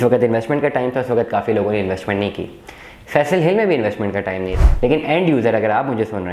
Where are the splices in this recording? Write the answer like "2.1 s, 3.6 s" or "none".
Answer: 4.4 s